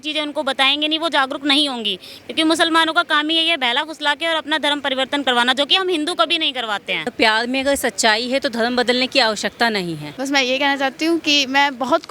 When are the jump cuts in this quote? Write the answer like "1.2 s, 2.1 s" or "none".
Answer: 7.1 s, 10.1 s

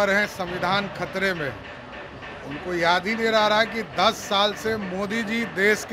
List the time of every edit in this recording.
none

